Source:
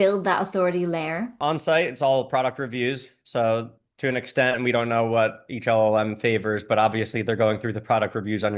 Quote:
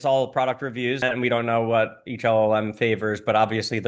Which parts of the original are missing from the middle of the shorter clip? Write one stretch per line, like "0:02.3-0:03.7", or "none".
0:03.0-0:04.5